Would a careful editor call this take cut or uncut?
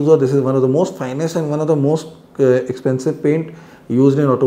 uncut